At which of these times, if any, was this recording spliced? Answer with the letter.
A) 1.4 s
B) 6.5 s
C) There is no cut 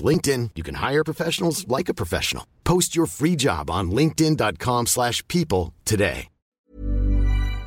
B